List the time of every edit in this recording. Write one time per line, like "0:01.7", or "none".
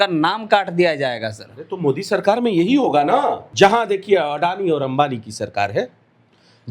0:03.4